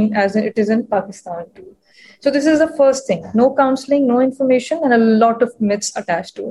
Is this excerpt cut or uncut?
uncut